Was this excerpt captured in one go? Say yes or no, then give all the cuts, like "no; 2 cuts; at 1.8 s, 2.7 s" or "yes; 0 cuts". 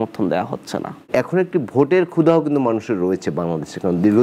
no; 1 cut; at 1.1 s